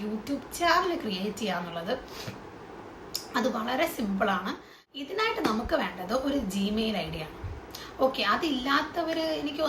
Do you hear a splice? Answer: no; 0 cuts

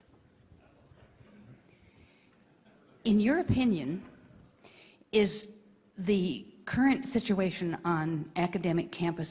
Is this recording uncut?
yes; 0 cuts

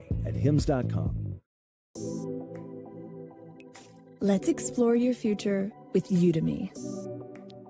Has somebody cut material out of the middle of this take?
yes; 1 cut; at 1.5 s

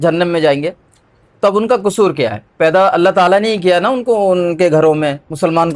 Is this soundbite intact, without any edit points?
yes; 0 cuts

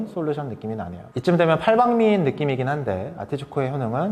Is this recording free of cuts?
yes; 0 cuts

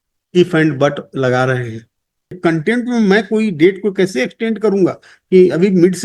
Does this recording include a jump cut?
yes; 1 cut; at 2.4 s

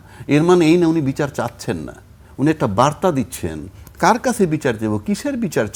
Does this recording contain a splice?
no; 0 cuts

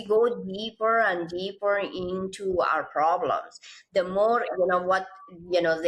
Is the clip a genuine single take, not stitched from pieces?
yes; 0 cuts

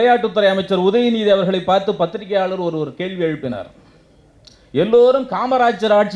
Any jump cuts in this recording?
no; 0 cuts

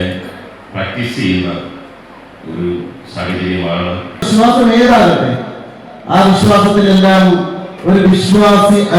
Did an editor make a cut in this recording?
yes; 1 cut; at 4.1 s

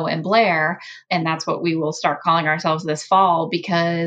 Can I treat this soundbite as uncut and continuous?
no; 1 cut; at 0.9 s

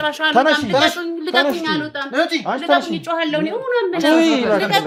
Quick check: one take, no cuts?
yes; 0 cuts

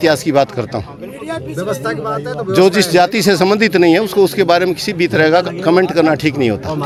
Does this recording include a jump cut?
no; 0 cuts

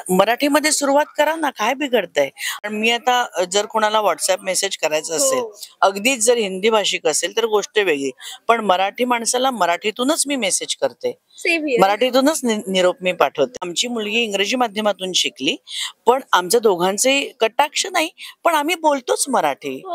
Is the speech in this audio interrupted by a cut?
yes; 2 cuts; at 2.6 s, 13.6 s

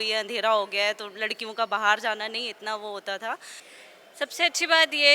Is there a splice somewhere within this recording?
yes; 1 cut; at 3.6 s

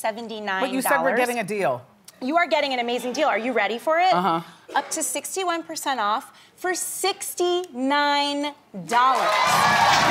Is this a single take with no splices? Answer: yes; 0 cuts

